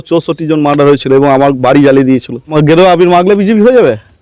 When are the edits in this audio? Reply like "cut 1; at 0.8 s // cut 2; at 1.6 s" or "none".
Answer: cut 1; at 2.5 s